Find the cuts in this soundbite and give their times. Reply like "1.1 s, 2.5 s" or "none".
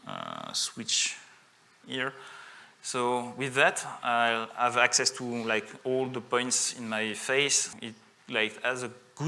7.7 s